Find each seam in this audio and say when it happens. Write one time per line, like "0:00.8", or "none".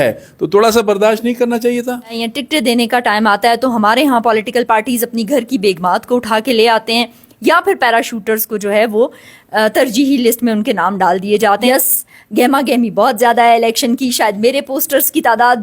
0:02.2
0:11.6